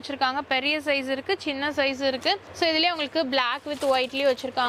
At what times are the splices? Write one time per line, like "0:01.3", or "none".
none